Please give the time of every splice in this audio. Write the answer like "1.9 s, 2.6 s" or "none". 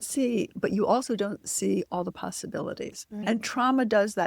3.2 s